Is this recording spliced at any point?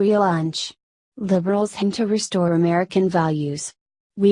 no; 0 cuts

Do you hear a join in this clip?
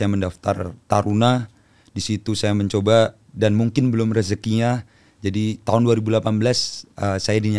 no; 0 cuts

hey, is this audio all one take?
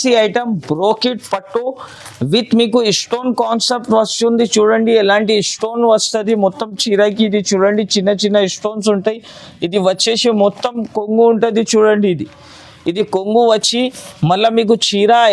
yes; 0 cuts

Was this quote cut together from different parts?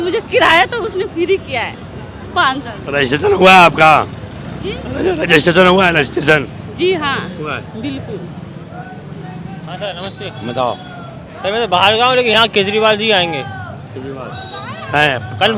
no; 0 cuts

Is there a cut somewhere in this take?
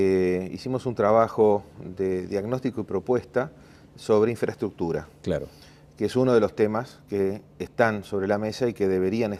no; 0 cuts

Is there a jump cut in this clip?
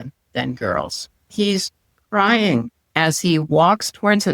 yes; 2 cuts; at 1.1 s, 2.8 s

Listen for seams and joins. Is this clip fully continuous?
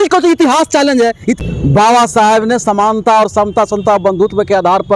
no; 1 cut; at 1.4 s

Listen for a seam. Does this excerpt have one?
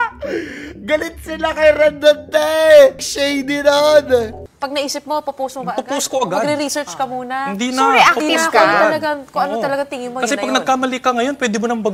yes; 2 cuts; at 3.1 s, 4.4 s

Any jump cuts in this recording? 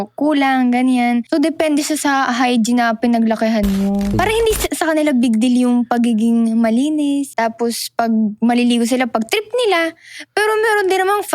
yes; 3 cuts; at 1.3 s, 4.1 s, 7.3 s

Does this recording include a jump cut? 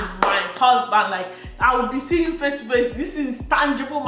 no; 0 cuts

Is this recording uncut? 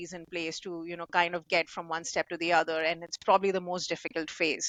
yes; 0 cuts

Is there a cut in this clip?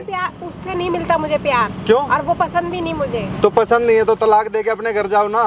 no; 0 cuts

